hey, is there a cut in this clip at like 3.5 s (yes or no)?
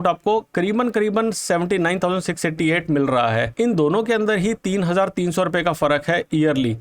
yes